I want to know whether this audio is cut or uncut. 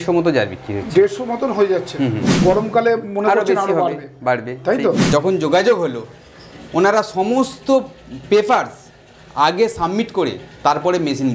cut